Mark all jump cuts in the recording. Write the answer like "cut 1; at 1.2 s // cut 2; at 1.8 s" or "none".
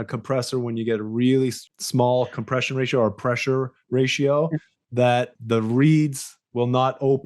cut 1; at 1.7 s // cut 2; at 5.3 s